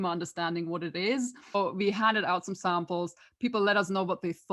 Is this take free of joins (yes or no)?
no